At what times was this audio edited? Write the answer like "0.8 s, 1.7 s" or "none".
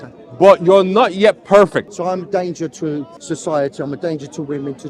1.9 s, 3.1 s